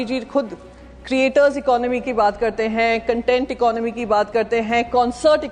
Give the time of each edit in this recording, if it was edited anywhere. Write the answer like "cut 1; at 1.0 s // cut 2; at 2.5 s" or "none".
none